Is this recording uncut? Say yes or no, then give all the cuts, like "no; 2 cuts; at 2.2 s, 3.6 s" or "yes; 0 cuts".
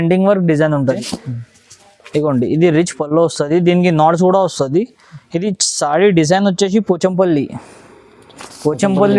no; 1 cut; at 1.0 s